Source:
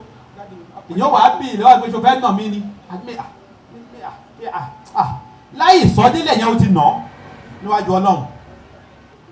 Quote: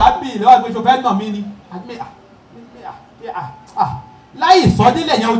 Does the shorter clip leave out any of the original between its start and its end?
no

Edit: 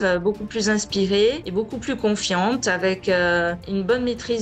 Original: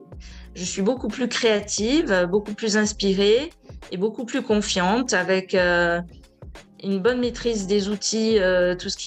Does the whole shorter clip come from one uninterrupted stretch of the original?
no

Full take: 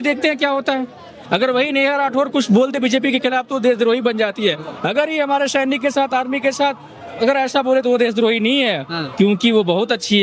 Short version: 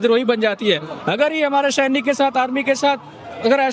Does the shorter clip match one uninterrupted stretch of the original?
yes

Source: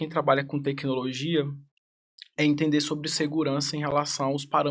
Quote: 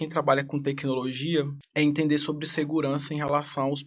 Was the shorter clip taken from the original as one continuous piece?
no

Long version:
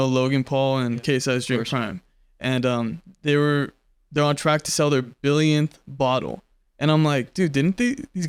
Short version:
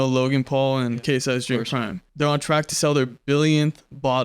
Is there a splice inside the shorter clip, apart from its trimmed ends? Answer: yes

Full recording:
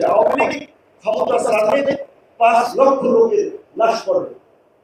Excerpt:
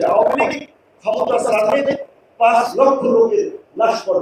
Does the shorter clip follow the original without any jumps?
yes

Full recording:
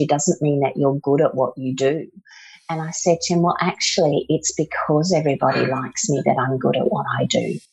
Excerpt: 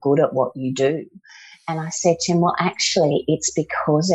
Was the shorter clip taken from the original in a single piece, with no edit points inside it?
yes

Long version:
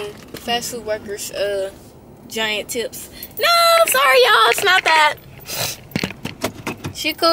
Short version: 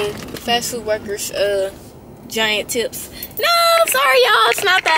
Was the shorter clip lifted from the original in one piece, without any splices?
yes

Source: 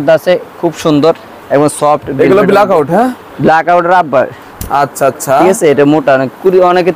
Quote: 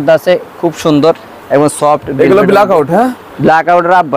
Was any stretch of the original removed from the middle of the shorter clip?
no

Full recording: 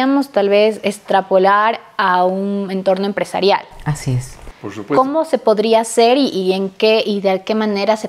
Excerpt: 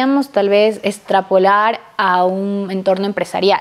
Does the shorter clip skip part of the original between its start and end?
no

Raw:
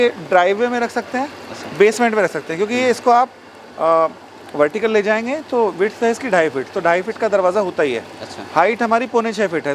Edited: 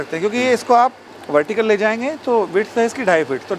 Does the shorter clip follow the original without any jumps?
no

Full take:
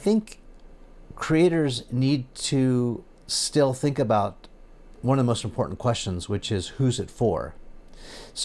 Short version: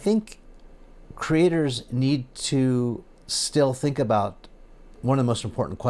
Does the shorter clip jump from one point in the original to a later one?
no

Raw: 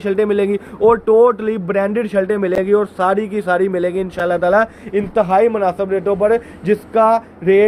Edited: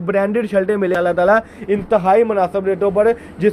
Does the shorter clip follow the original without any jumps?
no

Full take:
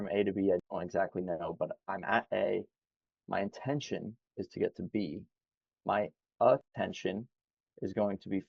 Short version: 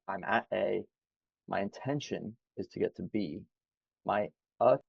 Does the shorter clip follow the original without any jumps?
yes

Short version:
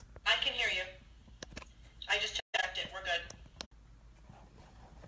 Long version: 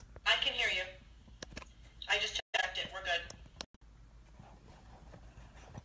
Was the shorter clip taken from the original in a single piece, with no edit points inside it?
no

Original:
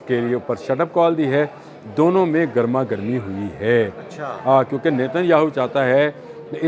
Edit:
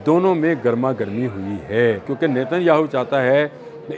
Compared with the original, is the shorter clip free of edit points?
no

